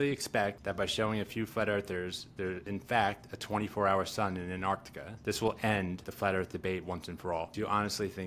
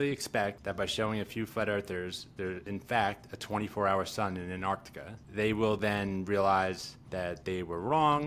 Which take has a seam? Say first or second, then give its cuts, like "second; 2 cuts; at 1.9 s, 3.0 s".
first; 1 cut; at 5.2 s